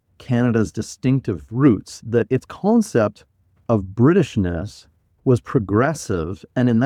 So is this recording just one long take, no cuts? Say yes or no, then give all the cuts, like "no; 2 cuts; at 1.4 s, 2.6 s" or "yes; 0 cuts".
yes; 0 cuts